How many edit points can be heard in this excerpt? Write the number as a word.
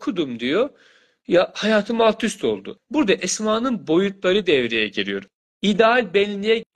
two